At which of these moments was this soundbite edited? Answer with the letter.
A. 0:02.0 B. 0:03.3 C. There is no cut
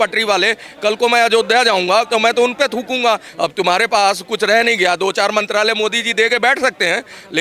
B